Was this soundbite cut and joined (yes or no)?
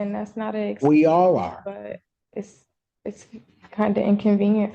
yes